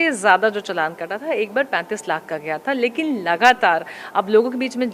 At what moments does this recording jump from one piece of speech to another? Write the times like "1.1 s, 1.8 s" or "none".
none